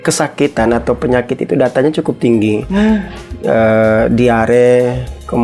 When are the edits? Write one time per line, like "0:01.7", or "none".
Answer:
none